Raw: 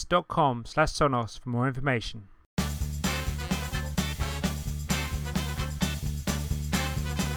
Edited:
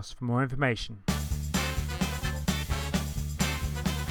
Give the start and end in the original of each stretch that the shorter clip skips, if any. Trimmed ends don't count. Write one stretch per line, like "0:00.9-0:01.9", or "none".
0:02.2-0:02.4